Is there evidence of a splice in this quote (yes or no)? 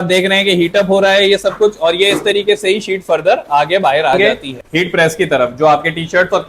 yes